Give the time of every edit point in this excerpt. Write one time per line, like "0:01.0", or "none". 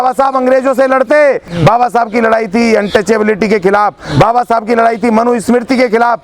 0:01.5